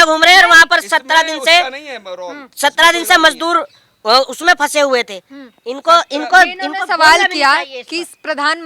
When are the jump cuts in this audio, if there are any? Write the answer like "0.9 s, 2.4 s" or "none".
none